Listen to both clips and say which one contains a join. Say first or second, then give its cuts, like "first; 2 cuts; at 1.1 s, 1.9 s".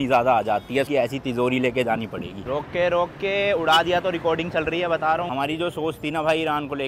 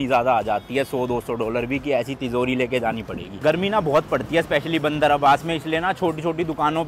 first; 3 cuts; at 0.9 s, 2.5 s, 5.3 s